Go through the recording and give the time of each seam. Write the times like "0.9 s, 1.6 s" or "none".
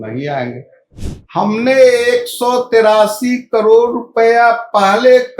1.0 s